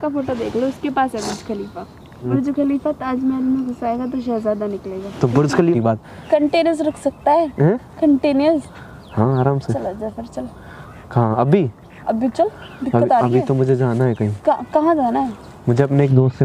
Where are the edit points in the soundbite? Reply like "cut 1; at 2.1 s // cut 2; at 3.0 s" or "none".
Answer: cut 1; at 2.3 s // cut 2; at 5.8 s

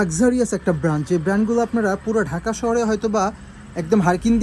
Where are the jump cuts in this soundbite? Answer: none

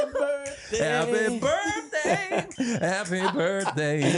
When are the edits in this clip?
cut 1; at 2.5 s

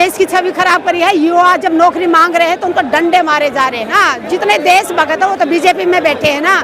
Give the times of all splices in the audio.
cut 1; at 3.9 s

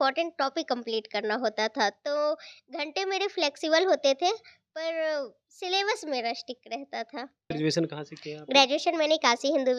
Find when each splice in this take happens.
cut 1; at 7.5 s

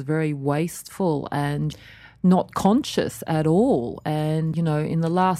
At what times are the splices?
cut 1; at 1.7 s // cut 2; at 4.5 s

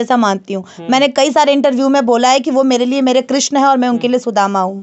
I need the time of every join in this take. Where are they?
none

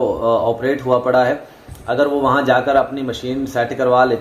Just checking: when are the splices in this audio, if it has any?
none

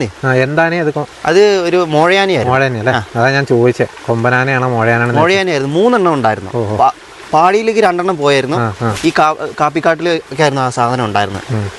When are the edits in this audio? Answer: none

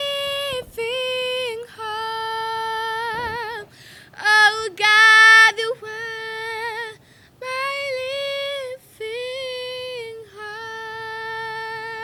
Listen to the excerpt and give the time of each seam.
none

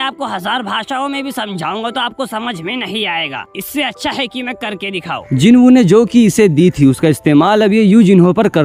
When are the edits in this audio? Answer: none

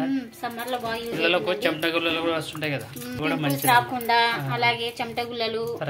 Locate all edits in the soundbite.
cut 1; at 3.2 s

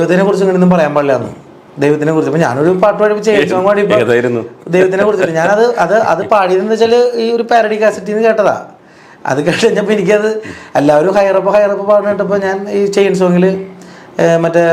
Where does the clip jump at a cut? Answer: none

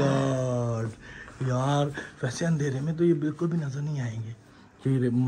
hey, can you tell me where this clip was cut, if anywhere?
none

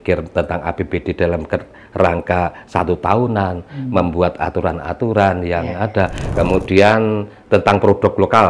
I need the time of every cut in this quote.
cut 1; at 6.2 s

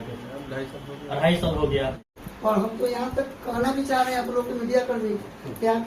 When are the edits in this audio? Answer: cut 1; at 2.1 s

